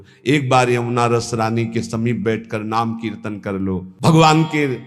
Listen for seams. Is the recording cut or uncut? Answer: cut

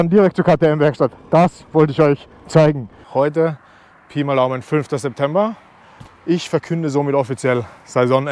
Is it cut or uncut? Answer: cut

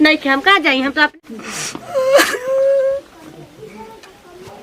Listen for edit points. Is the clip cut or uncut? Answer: cut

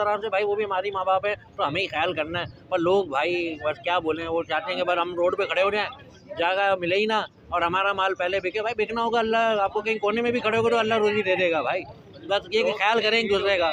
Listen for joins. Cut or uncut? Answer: uncut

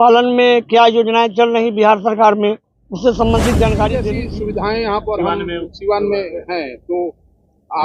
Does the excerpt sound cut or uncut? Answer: cut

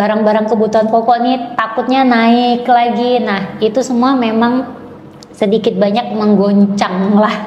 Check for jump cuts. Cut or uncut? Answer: uncut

